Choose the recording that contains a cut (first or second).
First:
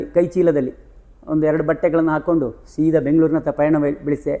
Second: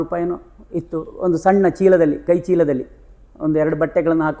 second